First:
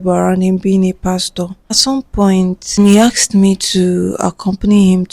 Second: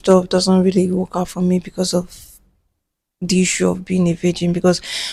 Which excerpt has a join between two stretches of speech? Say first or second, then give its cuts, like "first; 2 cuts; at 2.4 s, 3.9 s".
first; 2 cuts; at 1.8 s, 2.8 s